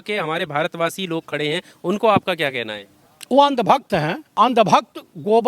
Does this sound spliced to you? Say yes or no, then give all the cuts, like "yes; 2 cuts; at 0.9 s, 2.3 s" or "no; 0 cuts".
yes; 1 cut; at 4.2 s